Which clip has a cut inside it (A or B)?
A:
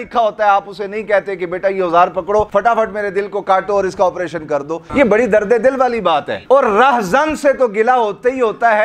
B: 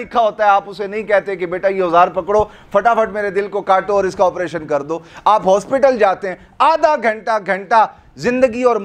A